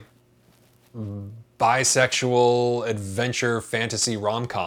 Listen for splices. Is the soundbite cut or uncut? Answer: uncut